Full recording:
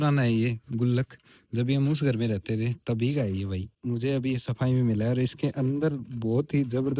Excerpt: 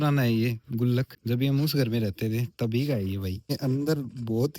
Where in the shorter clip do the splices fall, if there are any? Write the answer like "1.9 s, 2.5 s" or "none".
1.1 s, 3.4 s